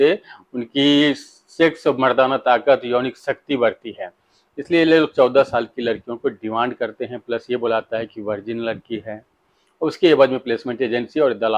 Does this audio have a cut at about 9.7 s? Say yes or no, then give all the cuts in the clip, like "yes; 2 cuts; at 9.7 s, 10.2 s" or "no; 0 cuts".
no; 0 cuts